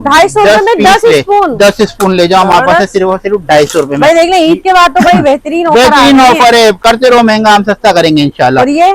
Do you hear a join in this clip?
no; 0 cuts

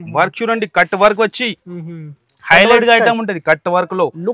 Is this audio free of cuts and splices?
yes; 0 cuts

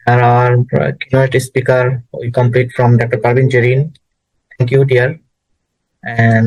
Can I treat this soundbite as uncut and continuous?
yes; 0 cuts

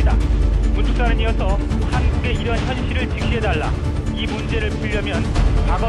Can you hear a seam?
yes; 1 cut; at 2.6 s

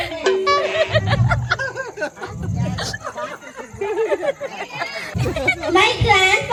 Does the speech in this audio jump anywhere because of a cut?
no; 0 cuts

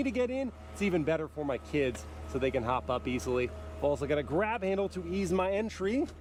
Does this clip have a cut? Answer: no; 0 cuts

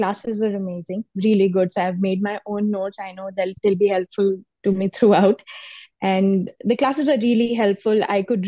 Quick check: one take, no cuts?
yes; 0 cuts

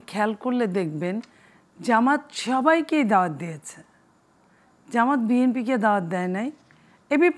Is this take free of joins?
yes; 0 cuts

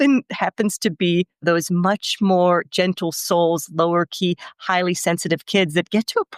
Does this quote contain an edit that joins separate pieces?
yes; 1 cut; at 2.7 s

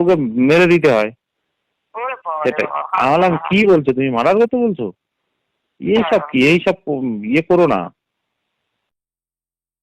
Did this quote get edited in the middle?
no; 0 cuts

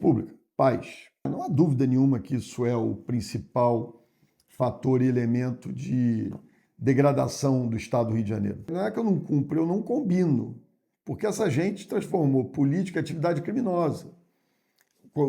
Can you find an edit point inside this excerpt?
yes; 2 cuts; at 1.3 s, 8.7 s

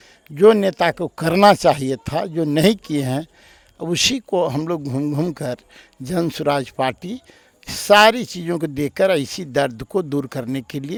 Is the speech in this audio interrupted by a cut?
no; 0 cuts

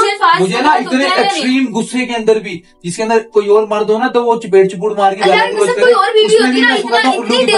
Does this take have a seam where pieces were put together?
no; 0 cuts

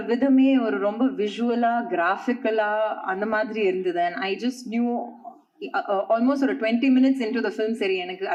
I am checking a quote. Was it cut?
no; 0 cuts

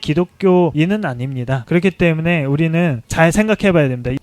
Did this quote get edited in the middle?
no; 0 cuts

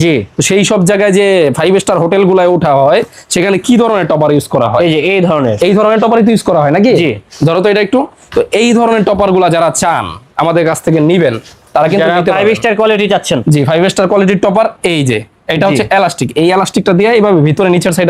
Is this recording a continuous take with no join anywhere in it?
yes; 0 cuts

